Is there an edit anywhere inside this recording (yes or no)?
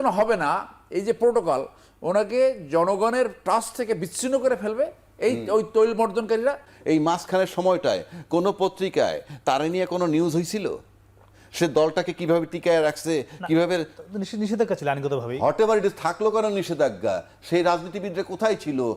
yes